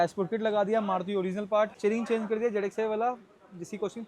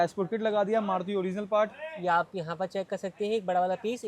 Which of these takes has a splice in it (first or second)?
first